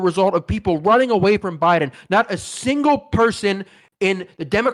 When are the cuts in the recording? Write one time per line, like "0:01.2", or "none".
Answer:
none